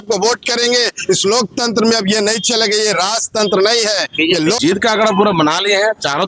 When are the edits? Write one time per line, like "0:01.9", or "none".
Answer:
0:04.6